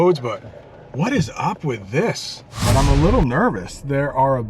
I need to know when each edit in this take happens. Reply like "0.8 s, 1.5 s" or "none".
2.6 s